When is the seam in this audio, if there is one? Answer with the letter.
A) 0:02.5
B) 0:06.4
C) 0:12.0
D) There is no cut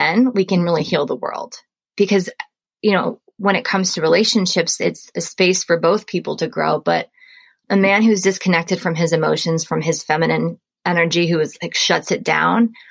D